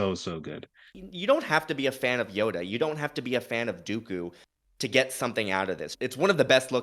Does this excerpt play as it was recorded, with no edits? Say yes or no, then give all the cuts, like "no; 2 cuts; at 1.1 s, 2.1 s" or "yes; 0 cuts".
no; 2 cuts; at 0.9 s, 5.9 s